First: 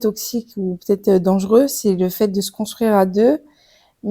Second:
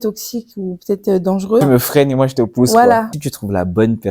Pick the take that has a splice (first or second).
second